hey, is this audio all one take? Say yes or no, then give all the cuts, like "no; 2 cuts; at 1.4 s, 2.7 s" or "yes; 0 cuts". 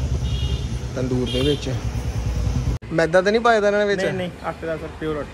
no; 1 cut; at 2.7 s